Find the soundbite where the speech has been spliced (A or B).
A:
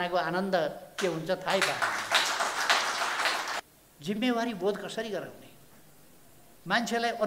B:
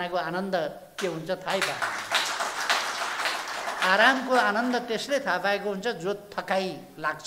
A